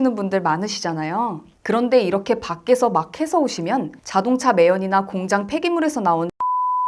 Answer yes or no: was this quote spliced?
no